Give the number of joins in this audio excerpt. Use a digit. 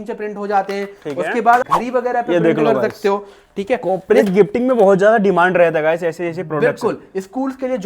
1